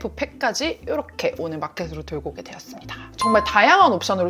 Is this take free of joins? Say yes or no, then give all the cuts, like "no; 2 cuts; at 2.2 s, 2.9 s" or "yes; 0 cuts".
no; 1 cut; at 3.1 s